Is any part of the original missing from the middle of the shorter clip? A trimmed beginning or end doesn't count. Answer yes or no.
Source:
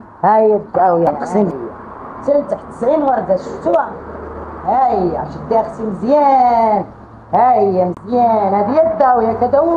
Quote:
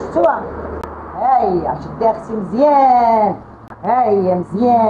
no